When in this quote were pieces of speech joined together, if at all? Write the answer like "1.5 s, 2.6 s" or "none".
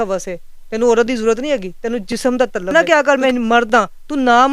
2.7 s